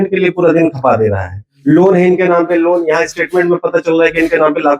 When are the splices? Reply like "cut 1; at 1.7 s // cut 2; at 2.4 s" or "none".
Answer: none